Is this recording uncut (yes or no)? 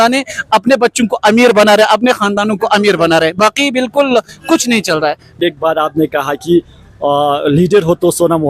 yes